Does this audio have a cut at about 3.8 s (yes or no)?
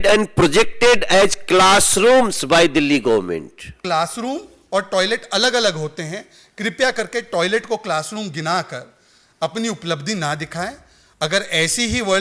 yes